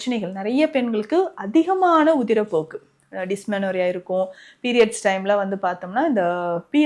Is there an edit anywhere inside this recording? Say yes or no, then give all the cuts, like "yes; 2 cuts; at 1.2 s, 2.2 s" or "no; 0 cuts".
no; 0 cuts